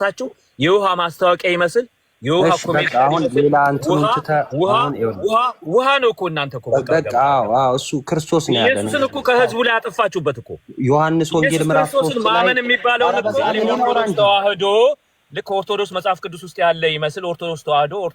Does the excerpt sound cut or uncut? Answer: cut